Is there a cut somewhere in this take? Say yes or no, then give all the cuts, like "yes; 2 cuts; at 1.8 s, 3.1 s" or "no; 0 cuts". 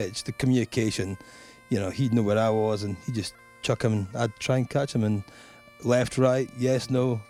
no; 0 cuts